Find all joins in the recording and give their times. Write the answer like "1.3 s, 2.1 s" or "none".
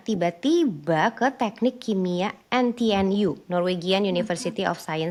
none